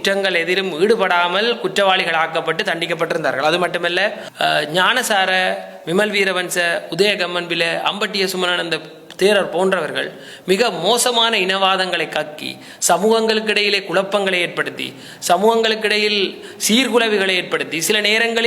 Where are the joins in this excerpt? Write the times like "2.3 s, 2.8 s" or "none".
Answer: 4.3 s

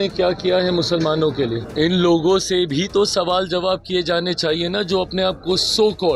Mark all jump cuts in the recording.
1.6 s

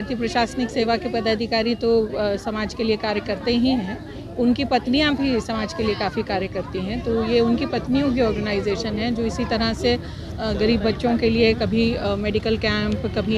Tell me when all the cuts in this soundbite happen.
none

